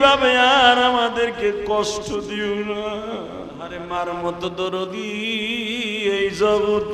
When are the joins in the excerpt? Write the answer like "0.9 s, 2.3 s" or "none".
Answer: 3.8 s